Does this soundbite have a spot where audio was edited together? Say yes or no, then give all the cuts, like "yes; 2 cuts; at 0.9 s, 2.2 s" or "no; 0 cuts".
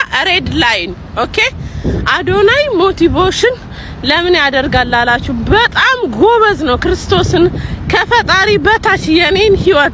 no; 0 cuts